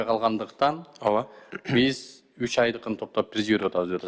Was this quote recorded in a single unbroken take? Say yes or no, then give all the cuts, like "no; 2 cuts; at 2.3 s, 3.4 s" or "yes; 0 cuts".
yes; 0 cuts